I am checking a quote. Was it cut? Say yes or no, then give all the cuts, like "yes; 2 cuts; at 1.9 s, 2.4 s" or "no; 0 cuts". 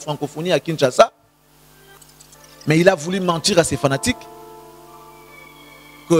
no; 0 cuts